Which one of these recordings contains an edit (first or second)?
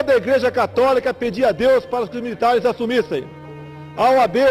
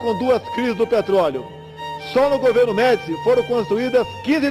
first